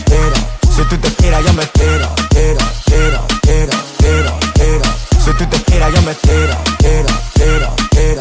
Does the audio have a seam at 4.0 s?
no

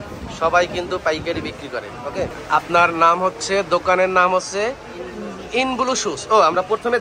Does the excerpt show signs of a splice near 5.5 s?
no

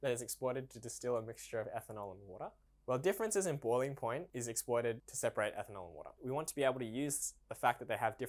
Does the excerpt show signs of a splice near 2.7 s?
no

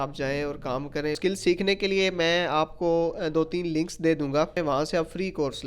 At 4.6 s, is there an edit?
yes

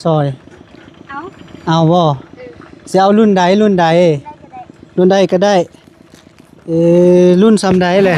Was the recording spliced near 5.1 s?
no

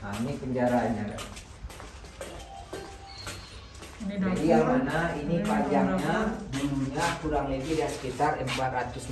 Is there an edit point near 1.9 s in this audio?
no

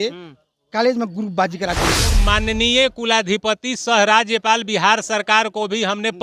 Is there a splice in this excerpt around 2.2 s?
yes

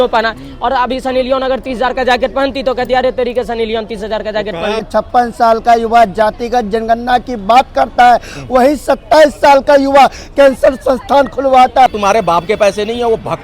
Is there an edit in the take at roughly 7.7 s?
no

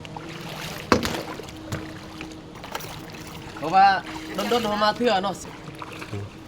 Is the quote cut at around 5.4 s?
yes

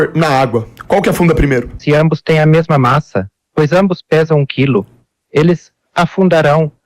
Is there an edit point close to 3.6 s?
no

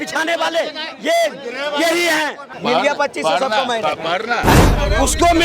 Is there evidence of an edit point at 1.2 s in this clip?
no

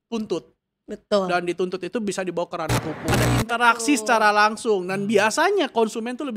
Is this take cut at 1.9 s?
no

